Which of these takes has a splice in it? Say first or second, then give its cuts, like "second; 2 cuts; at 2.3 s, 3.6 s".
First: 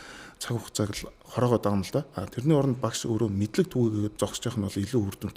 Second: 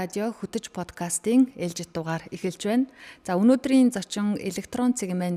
first; 1 cut; at 4.1 s